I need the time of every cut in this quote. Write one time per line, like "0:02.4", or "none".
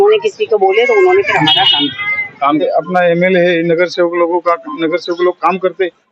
0:02.6